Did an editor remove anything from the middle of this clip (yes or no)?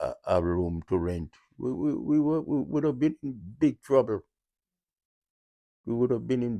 no